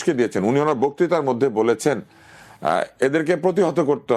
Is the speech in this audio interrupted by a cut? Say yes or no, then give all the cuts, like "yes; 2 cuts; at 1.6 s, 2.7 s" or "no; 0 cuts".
no; 0 cuts